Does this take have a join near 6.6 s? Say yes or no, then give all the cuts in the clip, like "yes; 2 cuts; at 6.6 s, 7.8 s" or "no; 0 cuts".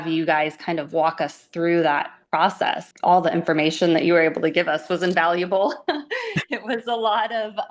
no; 1 cut; at 2.9 s